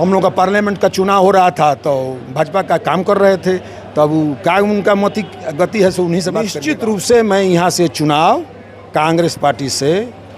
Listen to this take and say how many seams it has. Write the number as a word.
one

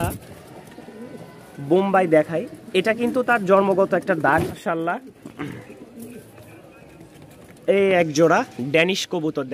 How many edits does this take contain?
one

